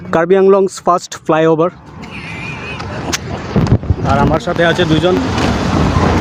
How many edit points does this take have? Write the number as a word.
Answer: zero